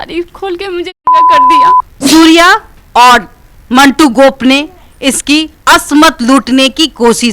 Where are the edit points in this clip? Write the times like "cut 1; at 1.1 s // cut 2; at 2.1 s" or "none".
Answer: cut 1; at 2.0 s